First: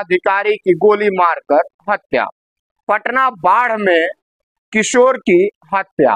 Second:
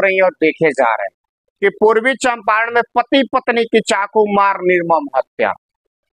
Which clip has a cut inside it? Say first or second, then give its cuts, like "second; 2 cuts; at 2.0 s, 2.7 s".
second; 1 cut; at 1.4 s